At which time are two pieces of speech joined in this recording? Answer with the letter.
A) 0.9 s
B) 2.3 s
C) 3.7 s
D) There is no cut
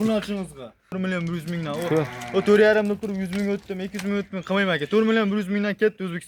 A